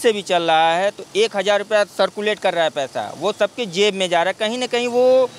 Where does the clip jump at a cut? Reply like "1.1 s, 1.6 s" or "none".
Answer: none